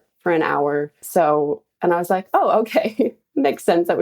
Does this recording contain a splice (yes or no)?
yes